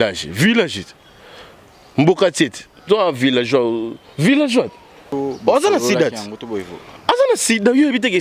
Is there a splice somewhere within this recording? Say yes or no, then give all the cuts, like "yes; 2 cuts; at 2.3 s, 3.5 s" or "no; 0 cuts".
yes; 1 cut; at 5.0 s